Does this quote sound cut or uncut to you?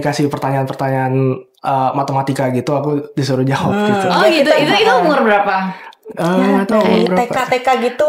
uncut